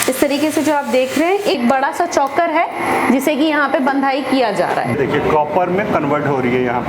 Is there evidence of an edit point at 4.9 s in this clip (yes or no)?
yes